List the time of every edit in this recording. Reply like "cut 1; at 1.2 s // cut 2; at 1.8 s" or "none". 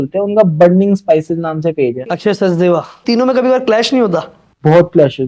cut 1; at 2.1 s // cut 2; at 3.0 s